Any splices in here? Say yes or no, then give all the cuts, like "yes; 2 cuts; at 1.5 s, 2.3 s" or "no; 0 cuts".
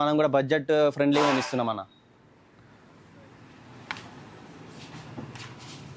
no; 0 cuts